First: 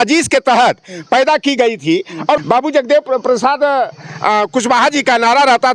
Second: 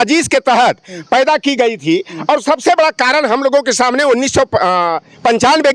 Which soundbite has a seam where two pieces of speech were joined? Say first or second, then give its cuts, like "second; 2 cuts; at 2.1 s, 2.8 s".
first; 1 cut; at 2.4 s